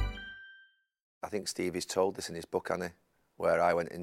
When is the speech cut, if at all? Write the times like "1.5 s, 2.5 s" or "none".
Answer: 1.1 s